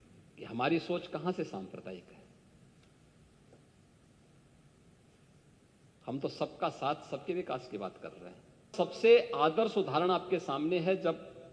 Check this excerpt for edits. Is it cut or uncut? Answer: cut